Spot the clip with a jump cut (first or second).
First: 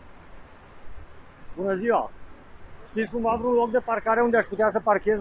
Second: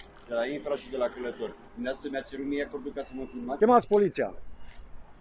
second